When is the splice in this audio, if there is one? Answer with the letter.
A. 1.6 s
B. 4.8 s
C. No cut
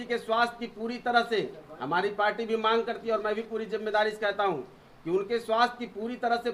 C